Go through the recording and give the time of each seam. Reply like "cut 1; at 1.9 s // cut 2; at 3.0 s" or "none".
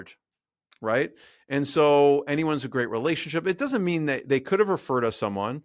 none